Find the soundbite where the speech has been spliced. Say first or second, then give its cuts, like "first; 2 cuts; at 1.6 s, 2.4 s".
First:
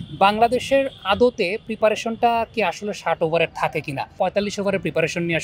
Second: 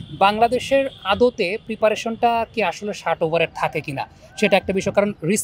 first; 1 cut; at 4.1 s